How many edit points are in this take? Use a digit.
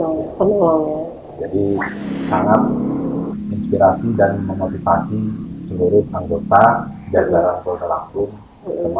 1